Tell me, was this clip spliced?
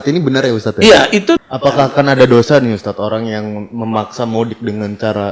yes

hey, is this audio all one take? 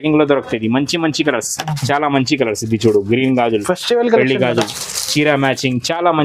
yes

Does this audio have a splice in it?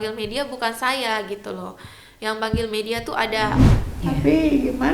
yes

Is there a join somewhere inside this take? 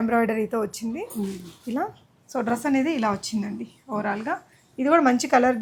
no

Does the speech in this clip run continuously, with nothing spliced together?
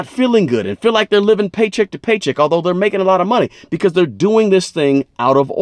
yes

